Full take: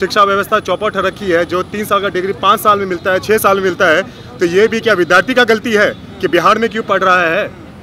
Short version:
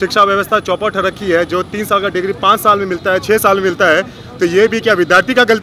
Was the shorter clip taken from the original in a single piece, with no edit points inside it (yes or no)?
yes